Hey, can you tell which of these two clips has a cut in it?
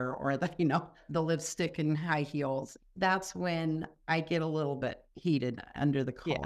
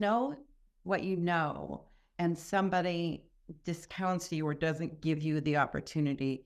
first; 3 cuts; at 1.0 s, 2.7 s, 5.1 s

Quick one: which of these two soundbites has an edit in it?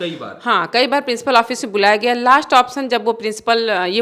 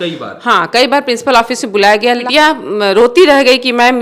second; 1 cut; at 2.2 s

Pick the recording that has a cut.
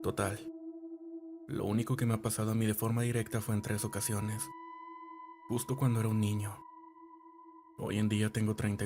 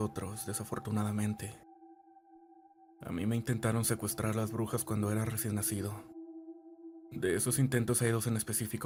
first; 2 cuts; at 6.5 s, 7.7 s

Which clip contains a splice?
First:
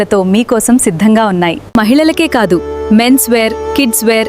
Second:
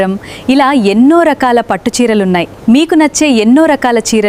first; 1 cut; at 1.6 s

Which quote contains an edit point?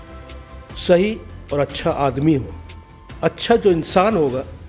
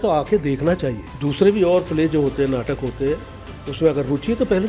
second; 1 cut; at 1.1 s

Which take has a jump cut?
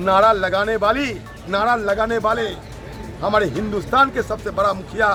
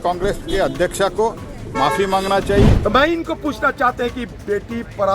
second; 1 cut; at 2.8 s

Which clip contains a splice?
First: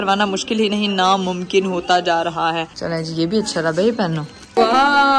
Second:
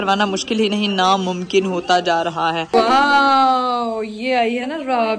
second; 1 cut; at 2.6 s

